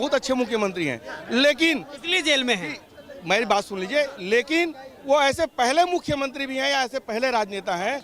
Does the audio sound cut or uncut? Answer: uncut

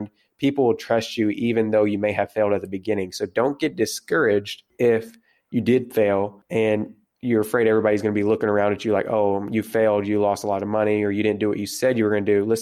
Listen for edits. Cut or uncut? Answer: uncut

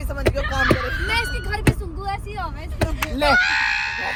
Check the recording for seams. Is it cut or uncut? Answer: uncut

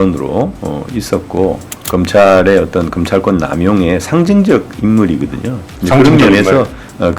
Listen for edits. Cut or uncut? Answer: cut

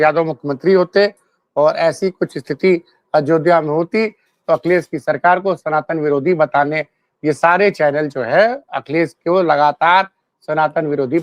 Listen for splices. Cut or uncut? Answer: uncut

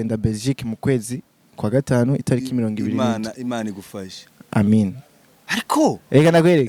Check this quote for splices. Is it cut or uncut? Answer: uncut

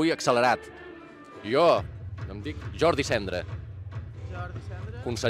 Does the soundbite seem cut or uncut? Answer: uncut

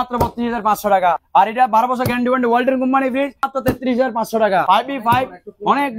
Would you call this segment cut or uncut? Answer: cut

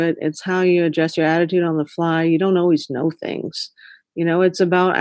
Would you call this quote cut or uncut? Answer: uncut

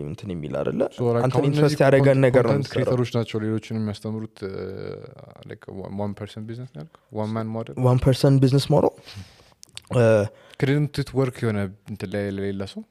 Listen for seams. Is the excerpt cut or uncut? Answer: uncut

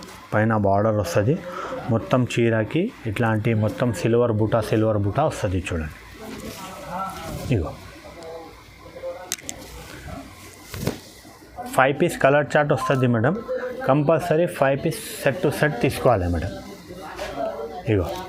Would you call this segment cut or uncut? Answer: uncut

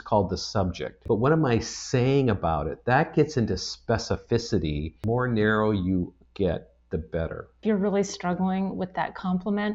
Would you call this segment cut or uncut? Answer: cut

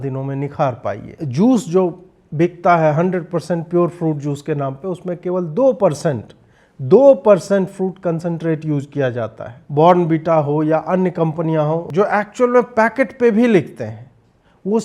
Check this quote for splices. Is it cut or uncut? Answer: cut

